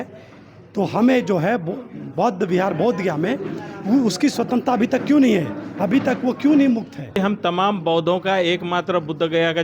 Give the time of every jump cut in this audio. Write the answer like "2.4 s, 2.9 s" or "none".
7.2 s